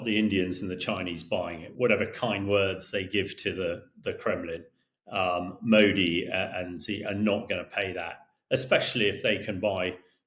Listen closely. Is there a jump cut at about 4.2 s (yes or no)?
no